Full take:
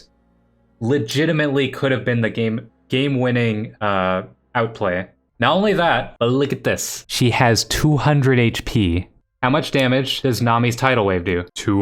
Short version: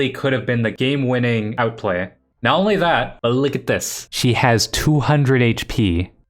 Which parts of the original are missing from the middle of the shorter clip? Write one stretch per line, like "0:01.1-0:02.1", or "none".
0:02.3-0:02.9
0:03.6-0:04.5